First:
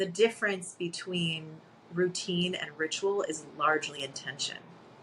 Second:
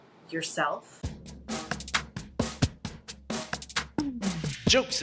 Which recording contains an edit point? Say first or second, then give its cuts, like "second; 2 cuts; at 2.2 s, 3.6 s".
second; 1 cut; at 0.9 s